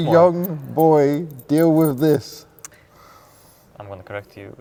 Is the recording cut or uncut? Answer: uncut